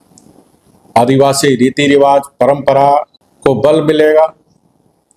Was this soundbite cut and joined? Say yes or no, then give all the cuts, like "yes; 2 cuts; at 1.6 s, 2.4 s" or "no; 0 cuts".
yes; 1 cut; at 3.2 s